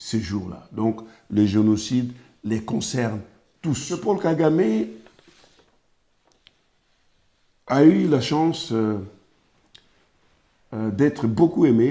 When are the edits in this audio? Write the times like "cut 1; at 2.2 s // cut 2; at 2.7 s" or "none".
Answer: cut 1; at 4.0 s